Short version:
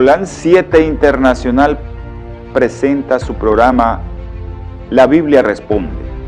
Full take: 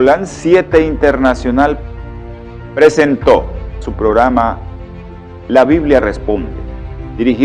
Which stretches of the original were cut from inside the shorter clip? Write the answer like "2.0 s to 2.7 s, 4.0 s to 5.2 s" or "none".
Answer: 2.8 s to 3.4 s